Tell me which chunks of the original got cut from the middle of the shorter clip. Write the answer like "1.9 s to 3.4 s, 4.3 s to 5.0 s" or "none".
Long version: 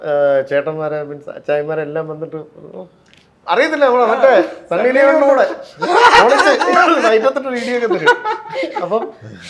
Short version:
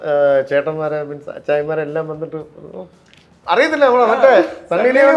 none